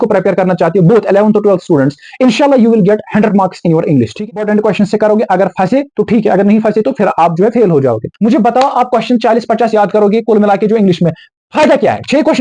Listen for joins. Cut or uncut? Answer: cut